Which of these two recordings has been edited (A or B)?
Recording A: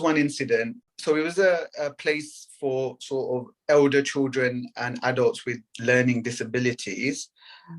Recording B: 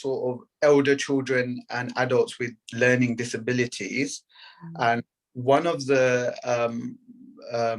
A